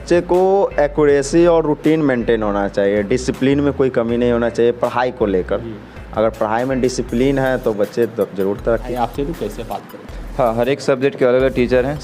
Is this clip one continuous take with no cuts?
no; 1 cut; at 8.9 s

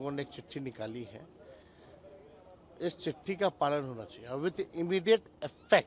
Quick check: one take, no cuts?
yes; 0 cuts

